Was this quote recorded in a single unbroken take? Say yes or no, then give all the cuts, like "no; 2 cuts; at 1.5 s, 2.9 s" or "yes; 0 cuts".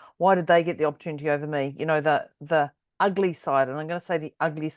no; 1 cut; at 2.8 s